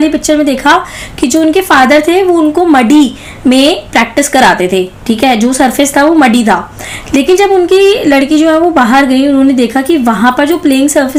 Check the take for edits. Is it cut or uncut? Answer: uncut